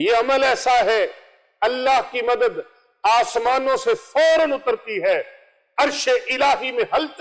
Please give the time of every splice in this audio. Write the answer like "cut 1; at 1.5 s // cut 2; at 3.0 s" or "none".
none

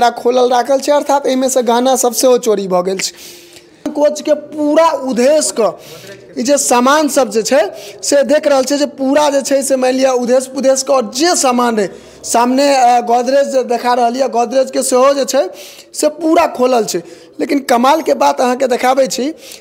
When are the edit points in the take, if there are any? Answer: cut 1; at 3.9 s

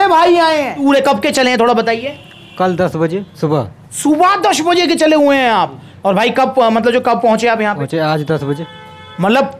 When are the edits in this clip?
cut 1; at 0.8 s // cut 2; at 3.3 s // cut 3; at 7.8 s

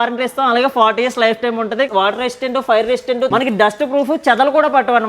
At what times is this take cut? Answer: cut 1; at 1.9 s // cut 2; at 3.3 s

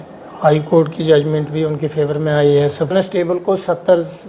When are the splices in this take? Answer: cut 1; at 2.9 s

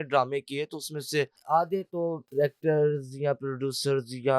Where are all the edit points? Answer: cut 1; at 1.4 s // cut 2; at 2.2 s

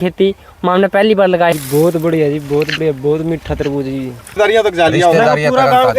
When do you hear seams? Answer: cut 1; at 1.5 s // cut 2; at 4.4 s

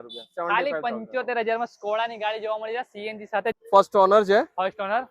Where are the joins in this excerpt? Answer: cut 1; at 3.6 s

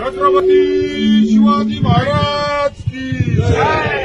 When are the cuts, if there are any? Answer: none

